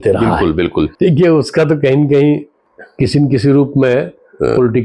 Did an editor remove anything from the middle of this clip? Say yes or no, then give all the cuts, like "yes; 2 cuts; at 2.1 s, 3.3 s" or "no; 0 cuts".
yes; 1 cut; at 0.9 s